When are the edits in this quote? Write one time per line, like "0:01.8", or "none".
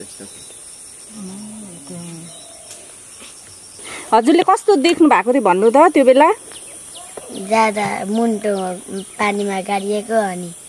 0:03.9